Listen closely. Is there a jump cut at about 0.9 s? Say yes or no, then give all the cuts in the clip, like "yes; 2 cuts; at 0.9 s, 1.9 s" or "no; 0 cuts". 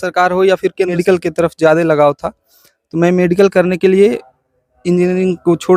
yes; 1 cut; at 0.9 s